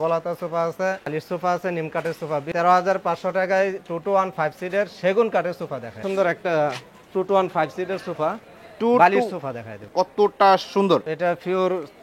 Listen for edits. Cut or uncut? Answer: cut